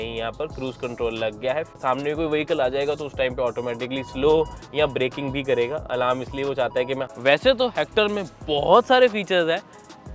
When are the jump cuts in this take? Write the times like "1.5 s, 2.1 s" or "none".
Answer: 1.8 s, 7.0 s